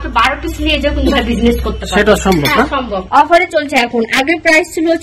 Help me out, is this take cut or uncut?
cut